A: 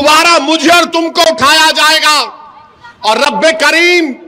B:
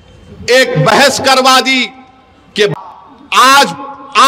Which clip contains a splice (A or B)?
B